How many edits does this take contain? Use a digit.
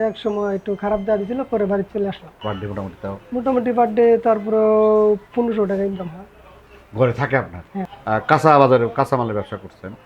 2